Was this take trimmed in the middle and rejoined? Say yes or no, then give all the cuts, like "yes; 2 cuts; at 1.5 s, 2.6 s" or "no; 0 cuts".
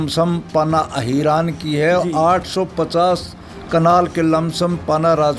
no; 0 cuts